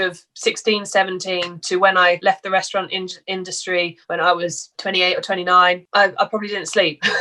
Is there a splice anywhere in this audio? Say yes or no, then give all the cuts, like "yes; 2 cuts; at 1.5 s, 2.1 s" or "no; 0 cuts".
yes; 1 cut; at 5.8 s